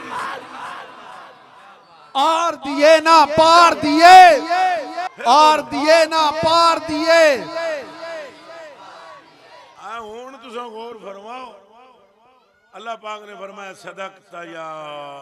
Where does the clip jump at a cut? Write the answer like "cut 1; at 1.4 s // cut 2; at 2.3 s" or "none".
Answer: none